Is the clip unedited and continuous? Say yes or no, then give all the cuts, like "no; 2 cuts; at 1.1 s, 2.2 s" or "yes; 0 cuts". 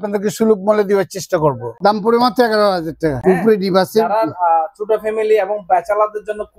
no; 2 cuts; at 1.7 s, 3.2 s